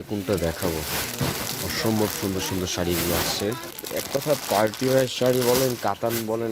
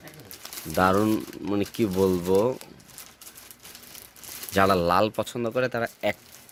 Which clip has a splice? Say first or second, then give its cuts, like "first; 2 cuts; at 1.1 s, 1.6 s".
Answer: first; 1 cut; at 3.8 s